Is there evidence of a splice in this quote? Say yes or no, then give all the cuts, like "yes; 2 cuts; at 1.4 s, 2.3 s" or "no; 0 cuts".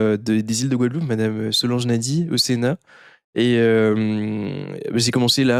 no; 0 cuts